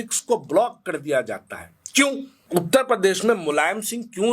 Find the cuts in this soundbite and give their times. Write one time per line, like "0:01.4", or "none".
0:02.4